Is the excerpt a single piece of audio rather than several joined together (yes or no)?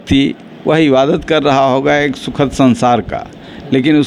yes